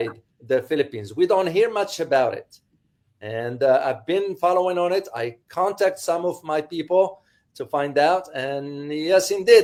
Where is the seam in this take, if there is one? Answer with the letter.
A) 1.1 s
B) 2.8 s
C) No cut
C